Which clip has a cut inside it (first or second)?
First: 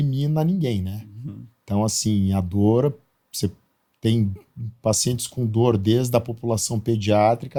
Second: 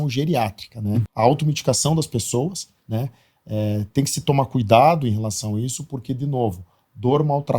second